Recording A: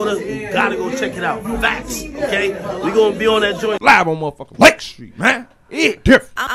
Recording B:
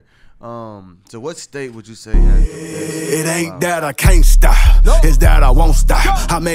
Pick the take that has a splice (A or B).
B